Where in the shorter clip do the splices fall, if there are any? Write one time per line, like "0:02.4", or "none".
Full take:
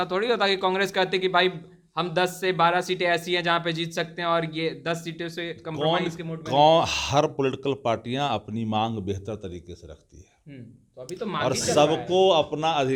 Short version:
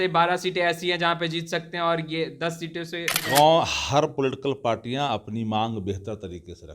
0:03.1